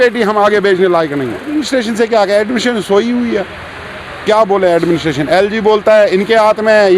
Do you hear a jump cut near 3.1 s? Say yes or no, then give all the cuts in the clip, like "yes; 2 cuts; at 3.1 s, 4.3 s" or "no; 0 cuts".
no; 1 cut; at 1.5 s